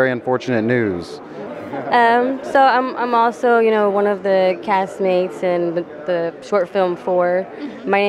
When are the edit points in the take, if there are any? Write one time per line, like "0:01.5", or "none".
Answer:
0:01.4